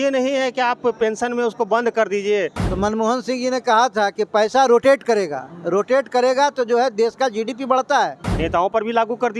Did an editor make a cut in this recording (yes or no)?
yes